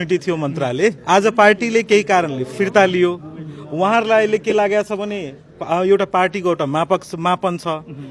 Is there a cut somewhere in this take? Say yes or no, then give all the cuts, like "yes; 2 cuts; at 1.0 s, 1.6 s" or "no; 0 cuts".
yes; 1 cut; at 1.0 s